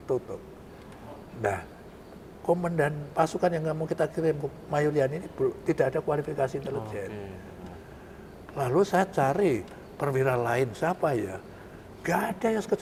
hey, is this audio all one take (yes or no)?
yes